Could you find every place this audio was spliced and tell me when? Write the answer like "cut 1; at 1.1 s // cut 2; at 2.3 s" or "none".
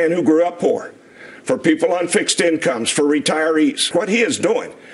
cut 1; at 3.9 s

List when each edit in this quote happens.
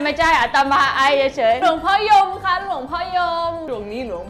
cut 1; at 1.6 s

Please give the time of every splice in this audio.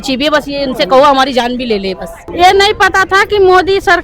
cut 1; at 2.2 s

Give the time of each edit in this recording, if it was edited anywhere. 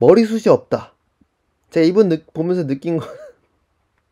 none

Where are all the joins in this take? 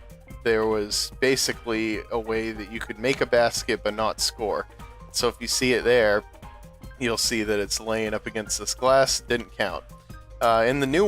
cut 1; at 2.9 s

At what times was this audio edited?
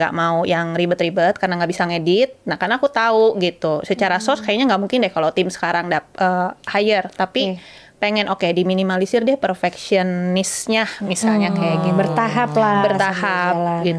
none

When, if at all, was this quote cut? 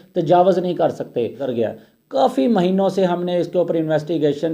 cut 1; at 1.5 s

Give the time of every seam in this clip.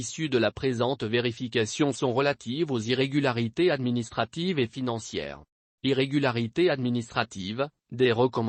none

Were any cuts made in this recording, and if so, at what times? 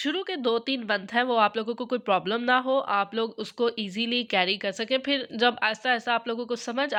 none

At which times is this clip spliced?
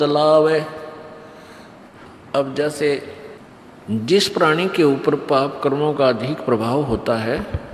cut 1; at 1.9 s

